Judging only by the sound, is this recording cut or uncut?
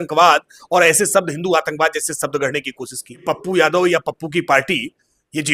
cut